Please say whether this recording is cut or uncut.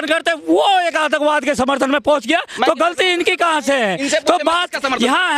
uncut